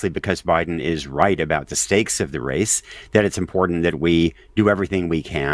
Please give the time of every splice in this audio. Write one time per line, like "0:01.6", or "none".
none